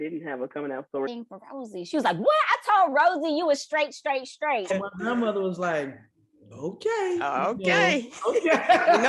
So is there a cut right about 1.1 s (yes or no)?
yes